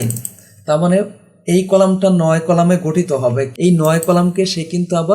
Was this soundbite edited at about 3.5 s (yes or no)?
yes